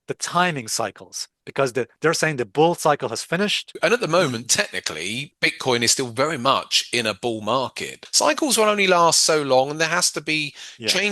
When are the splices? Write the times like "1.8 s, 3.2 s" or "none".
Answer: 3.7 s, 5.3 s, 8.0 s